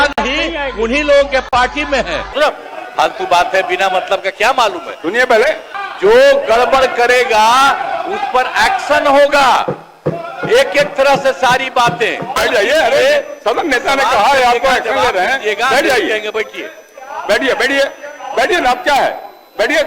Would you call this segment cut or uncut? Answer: cut